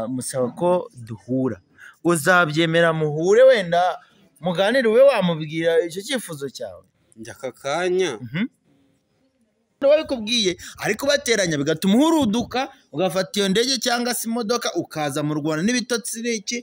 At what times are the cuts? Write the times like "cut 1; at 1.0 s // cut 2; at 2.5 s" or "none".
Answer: cut 1; at 9.8 s